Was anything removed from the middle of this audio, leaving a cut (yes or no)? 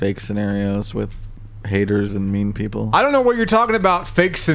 yes